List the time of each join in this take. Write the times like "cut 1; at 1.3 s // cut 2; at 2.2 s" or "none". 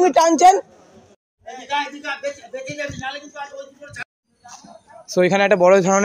cut 1; at 1.6 s // cut 2; at 4.0 s